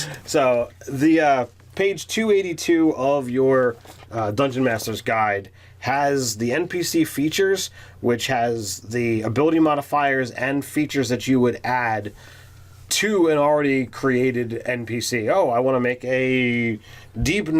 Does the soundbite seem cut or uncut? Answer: cut